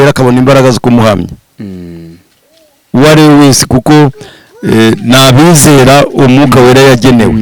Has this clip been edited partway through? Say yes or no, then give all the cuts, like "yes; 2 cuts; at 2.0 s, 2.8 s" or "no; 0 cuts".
no; 0 cuts